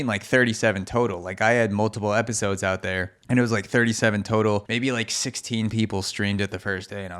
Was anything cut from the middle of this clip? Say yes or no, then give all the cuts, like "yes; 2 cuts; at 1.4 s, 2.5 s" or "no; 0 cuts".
yes; 2 cuts; at 3.1 s, 4.7 s